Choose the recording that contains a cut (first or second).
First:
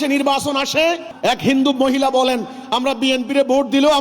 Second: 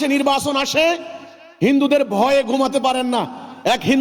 first